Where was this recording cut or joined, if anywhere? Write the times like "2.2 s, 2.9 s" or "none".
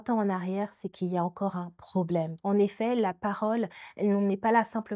2.3 s

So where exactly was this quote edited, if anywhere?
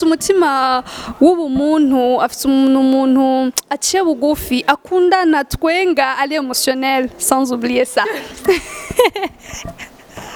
none

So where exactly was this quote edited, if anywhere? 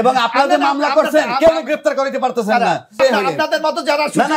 3.0 s

